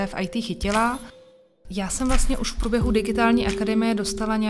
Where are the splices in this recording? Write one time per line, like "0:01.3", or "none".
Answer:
0:01.3